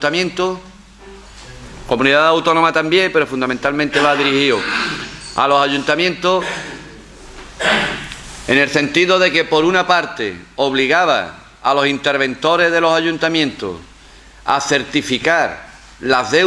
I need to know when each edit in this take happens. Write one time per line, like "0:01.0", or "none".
0:09.0